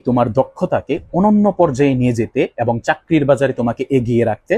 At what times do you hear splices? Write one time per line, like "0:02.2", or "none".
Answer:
none